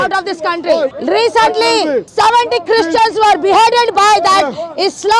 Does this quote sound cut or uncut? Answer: cut